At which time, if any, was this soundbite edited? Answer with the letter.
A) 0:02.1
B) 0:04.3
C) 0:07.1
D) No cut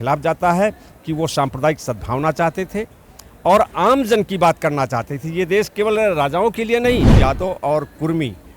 C